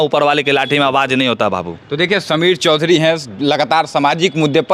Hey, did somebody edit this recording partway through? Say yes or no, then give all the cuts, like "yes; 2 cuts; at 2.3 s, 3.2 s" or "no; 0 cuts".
no; 0 cuts